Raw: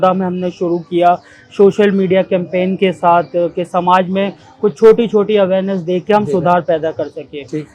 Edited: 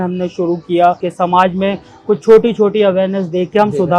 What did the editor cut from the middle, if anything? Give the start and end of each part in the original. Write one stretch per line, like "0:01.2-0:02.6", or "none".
0:01.3-0:03.6

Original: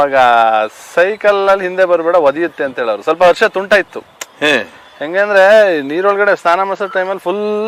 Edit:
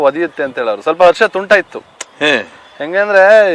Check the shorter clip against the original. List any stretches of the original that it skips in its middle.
none

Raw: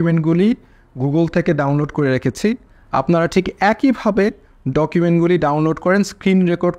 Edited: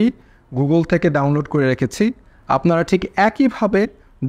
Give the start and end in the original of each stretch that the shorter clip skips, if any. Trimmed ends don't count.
none

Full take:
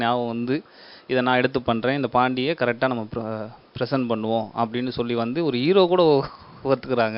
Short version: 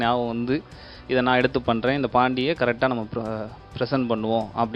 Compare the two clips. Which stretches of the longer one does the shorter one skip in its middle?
none

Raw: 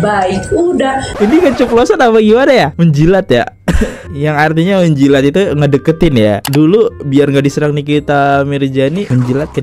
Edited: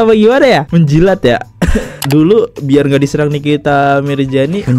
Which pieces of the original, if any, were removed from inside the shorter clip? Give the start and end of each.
0:04.1-0:06.4

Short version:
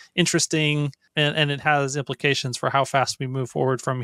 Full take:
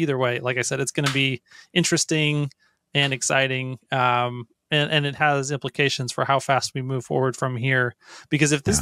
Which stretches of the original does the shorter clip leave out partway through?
0:02.6-0:04.6

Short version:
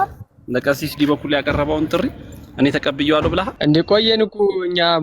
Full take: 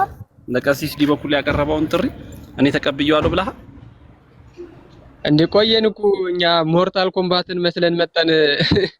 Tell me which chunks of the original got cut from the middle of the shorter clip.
0:03.5-0:05.2

